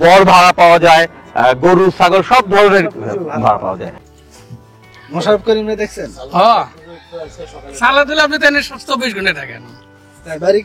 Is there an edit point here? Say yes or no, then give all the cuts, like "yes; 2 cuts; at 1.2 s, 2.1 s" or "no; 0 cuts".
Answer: yes; 1 cut; at 3.9 s